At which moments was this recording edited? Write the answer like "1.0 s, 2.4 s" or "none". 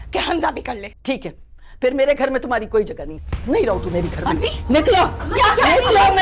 0.9 s